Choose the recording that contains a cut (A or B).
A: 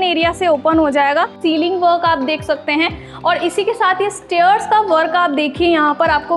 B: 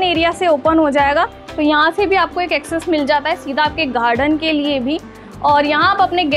A